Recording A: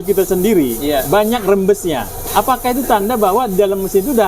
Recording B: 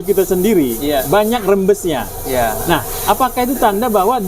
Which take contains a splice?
A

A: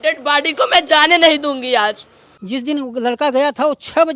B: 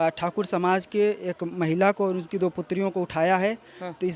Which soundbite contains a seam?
A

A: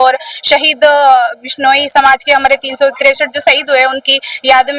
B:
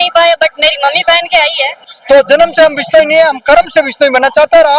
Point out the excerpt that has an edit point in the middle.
B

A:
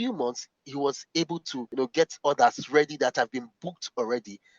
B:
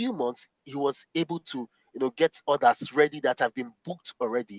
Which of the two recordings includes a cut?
A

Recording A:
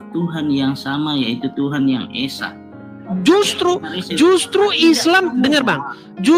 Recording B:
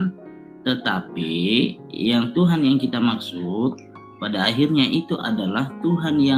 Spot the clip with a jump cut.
A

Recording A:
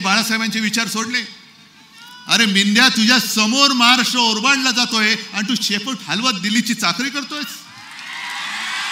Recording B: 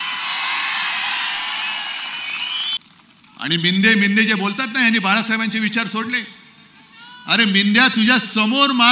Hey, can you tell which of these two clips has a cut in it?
B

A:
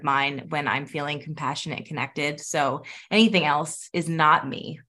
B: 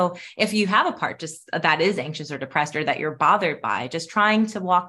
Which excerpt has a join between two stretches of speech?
A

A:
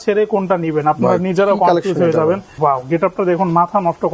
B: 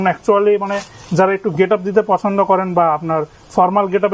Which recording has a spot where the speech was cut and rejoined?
A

